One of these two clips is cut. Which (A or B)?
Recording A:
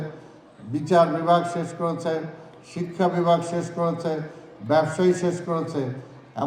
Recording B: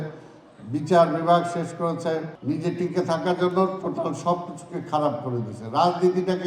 B